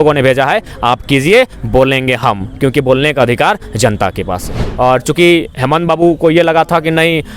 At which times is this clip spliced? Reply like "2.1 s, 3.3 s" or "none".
4.6 s